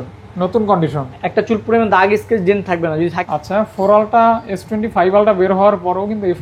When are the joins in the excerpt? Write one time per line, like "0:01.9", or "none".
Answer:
0:03.2